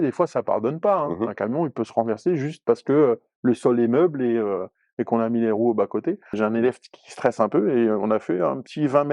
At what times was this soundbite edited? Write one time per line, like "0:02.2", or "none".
0:06.3